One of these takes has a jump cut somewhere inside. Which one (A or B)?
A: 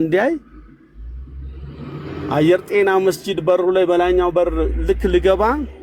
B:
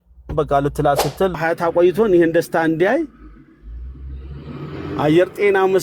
B